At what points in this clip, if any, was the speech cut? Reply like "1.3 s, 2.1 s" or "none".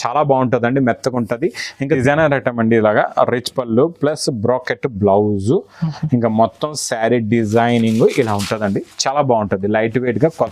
1.9 s